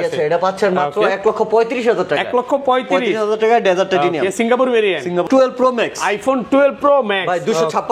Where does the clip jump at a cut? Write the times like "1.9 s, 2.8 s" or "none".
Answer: 5.3 s